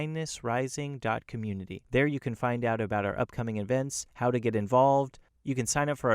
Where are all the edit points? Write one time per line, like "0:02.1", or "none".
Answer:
0:01.7